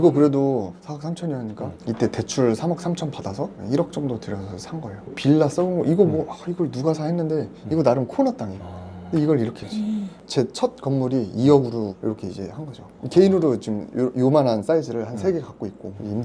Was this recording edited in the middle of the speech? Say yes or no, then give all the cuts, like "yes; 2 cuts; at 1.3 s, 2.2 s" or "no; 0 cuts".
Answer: yes; 1 cut; at 10.1 s